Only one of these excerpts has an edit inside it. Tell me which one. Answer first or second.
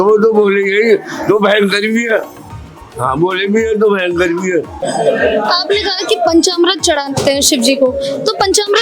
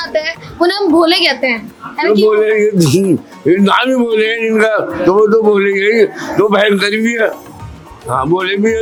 first